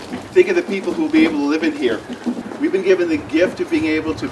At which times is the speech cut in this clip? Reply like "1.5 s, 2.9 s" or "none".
2.4 s

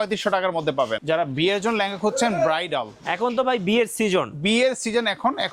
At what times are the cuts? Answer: 1.0 s

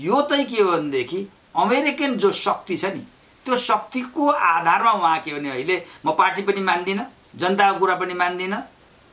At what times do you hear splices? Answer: none

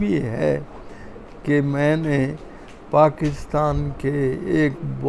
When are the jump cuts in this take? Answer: none

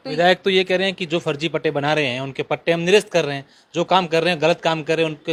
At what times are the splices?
none

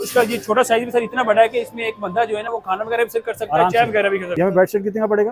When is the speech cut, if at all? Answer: 4.3 s

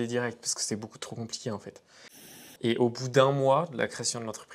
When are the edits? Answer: 2.3 s

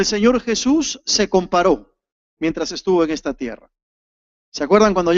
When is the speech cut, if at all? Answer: 2.0 s

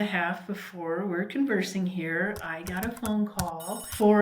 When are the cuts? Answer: none

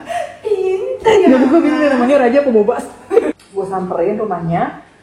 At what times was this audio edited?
3.3 s

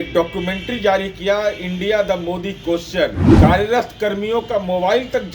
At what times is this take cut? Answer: 3.2 s

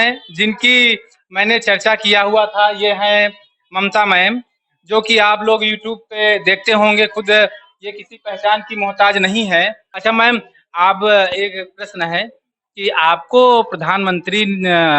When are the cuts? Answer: 9.8 s

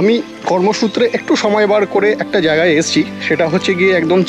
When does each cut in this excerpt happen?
none

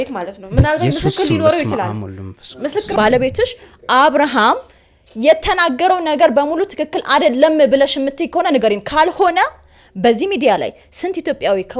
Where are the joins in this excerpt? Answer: 2.9 s

